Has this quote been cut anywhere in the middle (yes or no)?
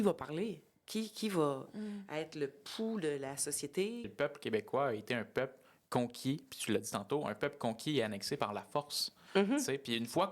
yes